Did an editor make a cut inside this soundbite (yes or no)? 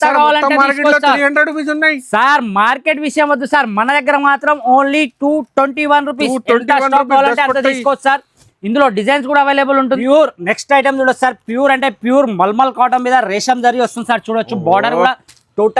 yes